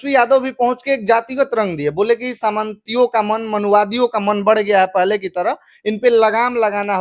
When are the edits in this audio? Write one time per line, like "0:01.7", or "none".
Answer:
none